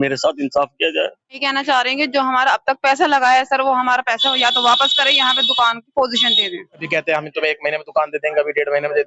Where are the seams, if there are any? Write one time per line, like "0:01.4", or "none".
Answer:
0:01.4
0:06.8